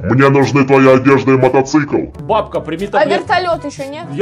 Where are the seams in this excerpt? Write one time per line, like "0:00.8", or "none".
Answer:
none